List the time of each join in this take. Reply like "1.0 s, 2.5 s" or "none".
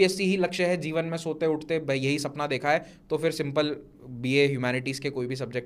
none